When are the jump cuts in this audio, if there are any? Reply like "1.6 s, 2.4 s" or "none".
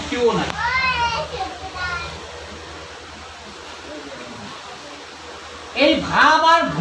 none